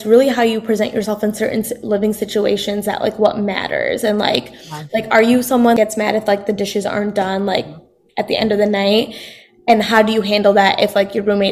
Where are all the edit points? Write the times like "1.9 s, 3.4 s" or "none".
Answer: 5.8 s

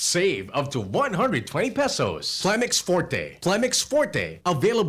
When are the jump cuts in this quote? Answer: 2.4 s

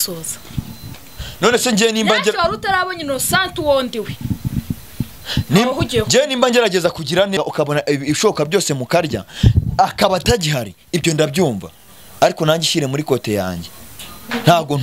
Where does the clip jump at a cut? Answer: 7.4 s

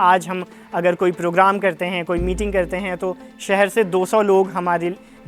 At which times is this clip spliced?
none

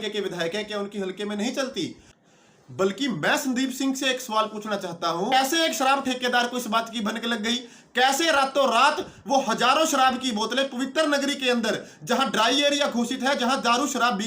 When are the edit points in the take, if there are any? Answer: 2.1 s, 5.3 s

